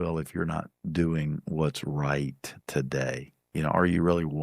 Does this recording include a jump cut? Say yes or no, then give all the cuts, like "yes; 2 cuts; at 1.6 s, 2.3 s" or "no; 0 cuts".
no; 0 cuts